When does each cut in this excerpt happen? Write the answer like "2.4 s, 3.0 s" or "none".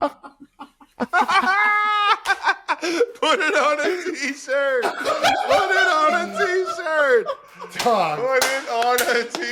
none